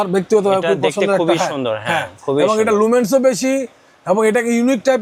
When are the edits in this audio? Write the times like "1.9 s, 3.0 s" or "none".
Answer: none